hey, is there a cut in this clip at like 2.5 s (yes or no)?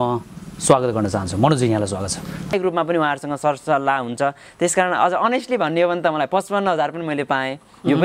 yes